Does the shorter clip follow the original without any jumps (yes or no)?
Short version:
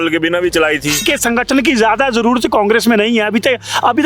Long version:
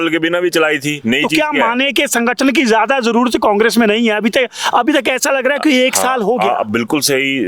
no